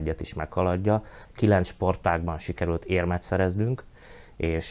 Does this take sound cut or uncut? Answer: cut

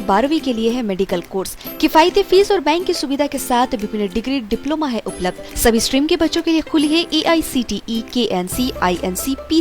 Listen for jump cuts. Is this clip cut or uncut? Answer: uncut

